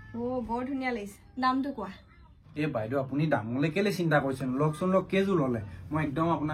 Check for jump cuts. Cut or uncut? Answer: uncut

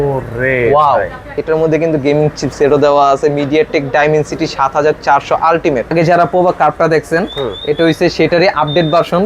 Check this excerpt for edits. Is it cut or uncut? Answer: cut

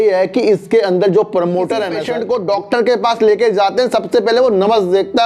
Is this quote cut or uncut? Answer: cut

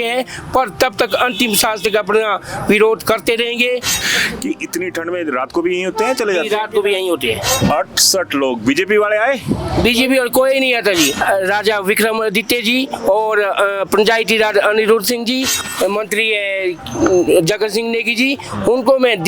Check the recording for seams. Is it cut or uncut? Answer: cut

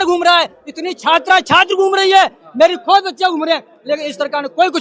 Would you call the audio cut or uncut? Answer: uncut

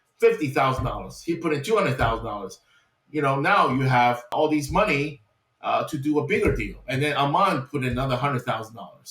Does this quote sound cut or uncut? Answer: cut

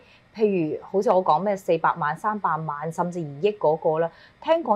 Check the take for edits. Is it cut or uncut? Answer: uncut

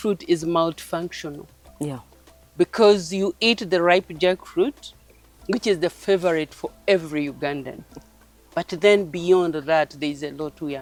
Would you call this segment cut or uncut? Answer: uncut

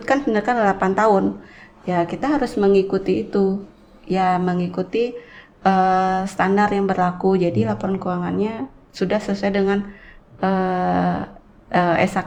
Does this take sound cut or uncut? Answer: uncut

